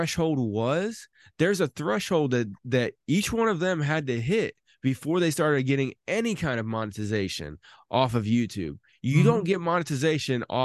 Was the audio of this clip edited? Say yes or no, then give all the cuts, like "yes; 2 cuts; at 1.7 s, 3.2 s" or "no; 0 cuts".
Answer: no; 0 cuts